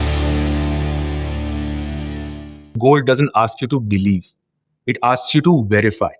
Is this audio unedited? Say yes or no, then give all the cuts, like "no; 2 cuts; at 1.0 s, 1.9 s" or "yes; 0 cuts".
no; 1 cut; at 2.7 s